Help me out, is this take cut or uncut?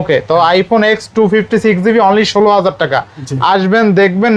uncut